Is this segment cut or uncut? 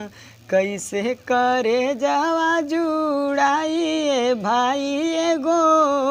uncut